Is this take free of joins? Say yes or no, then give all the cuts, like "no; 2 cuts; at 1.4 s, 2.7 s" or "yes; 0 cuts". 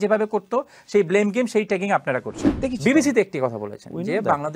no; 1 cut; at 2.5 s